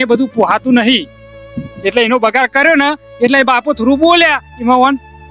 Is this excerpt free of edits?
yes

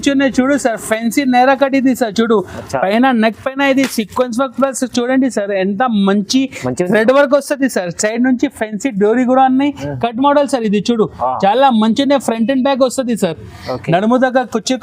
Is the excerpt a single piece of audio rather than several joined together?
yes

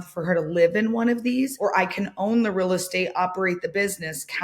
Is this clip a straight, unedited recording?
no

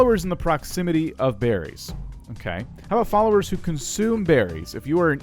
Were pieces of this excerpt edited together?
yes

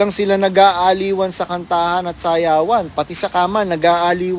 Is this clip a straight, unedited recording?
yes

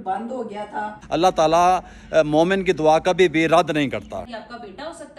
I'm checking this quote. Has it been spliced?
yes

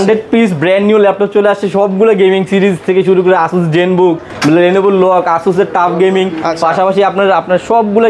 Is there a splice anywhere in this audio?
no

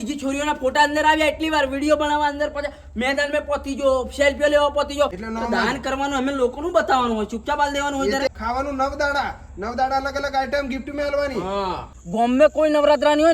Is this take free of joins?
no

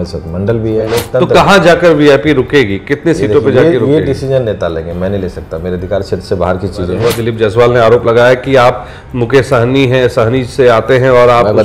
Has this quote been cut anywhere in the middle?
yes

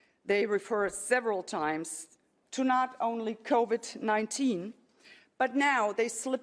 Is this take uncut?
yes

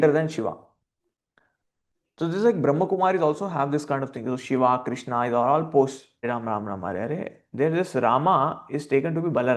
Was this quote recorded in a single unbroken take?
no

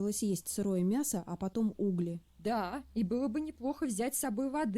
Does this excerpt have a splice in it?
yes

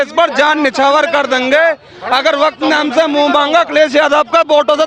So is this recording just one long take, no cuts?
yes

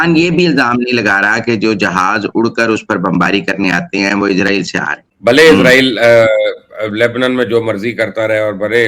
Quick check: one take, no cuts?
no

